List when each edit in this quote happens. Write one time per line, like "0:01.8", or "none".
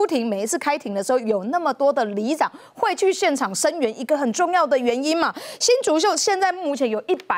none